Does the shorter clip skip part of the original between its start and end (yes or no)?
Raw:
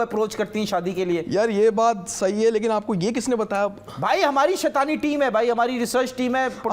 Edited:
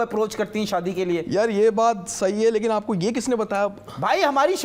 no